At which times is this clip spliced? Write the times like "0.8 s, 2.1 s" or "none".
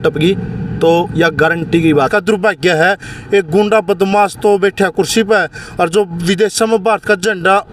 2.1 s

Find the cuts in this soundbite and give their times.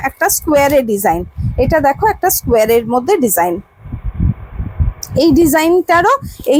none

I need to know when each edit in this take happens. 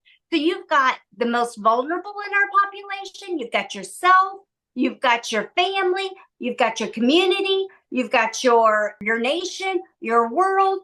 9.0 s

